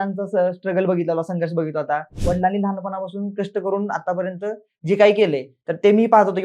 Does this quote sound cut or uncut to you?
cut